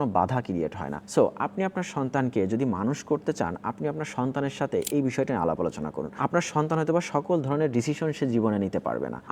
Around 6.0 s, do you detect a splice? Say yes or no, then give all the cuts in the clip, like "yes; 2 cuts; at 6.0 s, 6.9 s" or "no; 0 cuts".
no; 0 cuts